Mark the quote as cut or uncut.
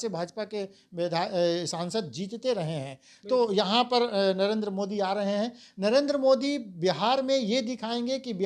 uncut